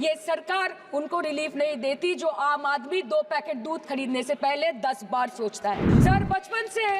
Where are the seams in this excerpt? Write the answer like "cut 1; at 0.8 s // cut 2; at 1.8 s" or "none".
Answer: cut 1; at 5.9 s